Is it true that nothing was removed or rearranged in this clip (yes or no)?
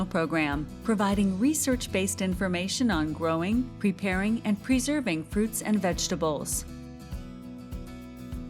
no